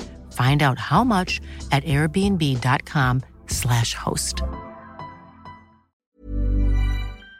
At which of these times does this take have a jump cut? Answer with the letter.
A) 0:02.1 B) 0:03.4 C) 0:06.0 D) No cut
C